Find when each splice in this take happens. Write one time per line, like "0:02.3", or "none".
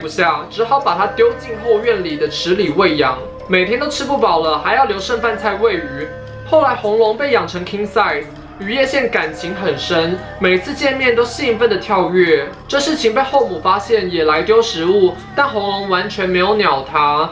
none